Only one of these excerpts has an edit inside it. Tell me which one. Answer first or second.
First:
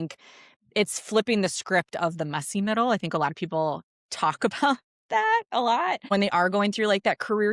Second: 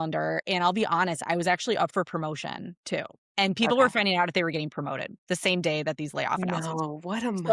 first